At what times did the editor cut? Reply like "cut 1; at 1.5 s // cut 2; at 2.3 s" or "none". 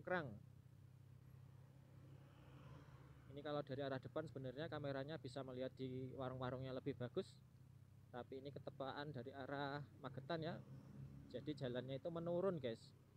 none